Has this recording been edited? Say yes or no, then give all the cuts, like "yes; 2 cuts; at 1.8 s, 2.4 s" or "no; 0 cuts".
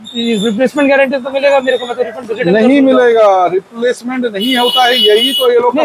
no; 0 cuts